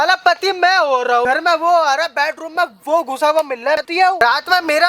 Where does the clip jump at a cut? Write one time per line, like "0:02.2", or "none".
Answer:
0:01.2
0:04.0